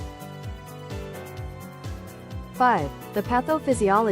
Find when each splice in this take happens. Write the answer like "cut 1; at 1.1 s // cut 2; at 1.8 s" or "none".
cut 1; at 2.6 s